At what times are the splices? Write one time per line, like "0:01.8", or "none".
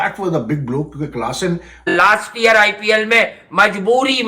0:01.9